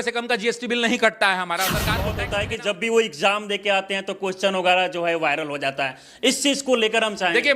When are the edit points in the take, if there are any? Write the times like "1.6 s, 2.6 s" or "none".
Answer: 2.2 s

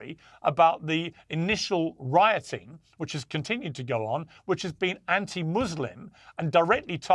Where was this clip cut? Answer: none

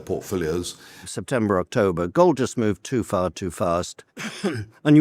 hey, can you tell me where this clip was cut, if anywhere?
1.1 s

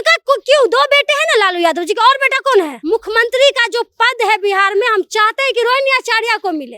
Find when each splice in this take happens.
2.8 s

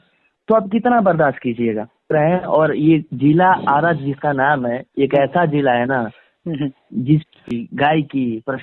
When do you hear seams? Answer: 2.1 s, 7.5 s

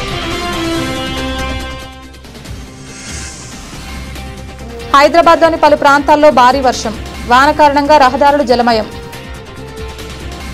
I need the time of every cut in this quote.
none

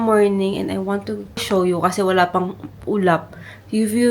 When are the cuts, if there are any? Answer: 1.4 s

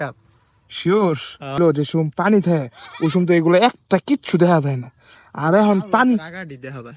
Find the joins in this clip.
1.6 s

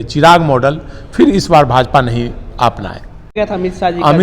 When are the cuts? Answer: 3.3 s

